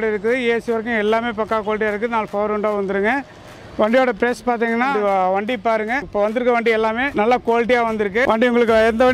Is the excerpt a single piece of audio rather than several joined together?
no; 4 cuts; at 4.9 s, 6.1 s, 7.1 s, 8.2 s

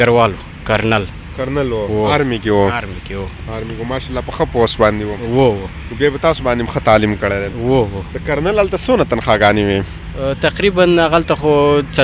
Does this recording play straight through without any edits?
yes; 0 cuts

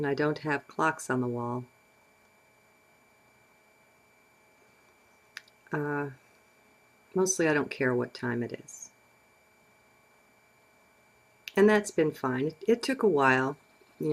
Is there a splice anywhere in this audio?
no; 0 cuts

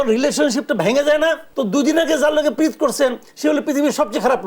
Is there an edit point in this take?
yes; 1 cut; at 1.5 s

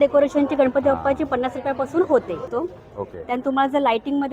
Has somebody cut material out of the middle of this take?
yes; 1 cut; at 2.4 s

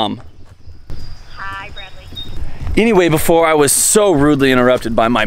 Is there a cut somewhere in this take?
yes; 1 cut; at 2.4 s

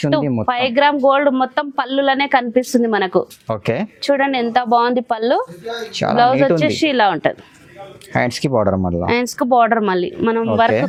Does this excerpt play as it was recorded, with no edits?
yes; 0 cuts

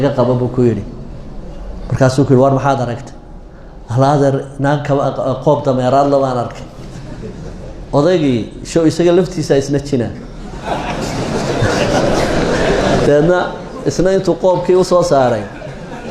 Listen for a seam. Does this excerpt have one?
no; 0 cuts

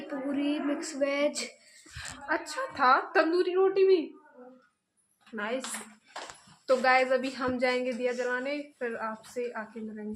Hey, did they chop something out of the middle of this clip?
no; 0 cuts

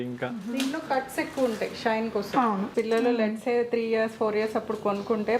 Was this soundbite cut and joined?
yes; 1 cut; at 2.7 s

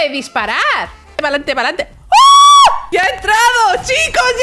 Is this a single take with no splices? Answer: no; 2 cuts; at 1.2 s, 2.8 s

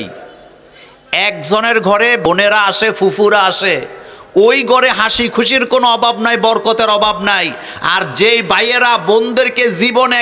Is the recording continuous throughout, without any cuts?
no; 1 cut; at 2.3 s

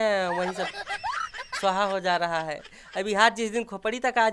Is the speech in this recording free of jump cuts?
yes; 0 cuts

